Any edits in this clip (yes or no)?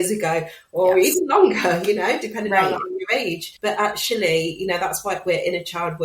yes